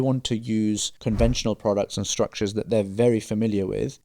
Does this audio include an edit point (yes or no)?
yes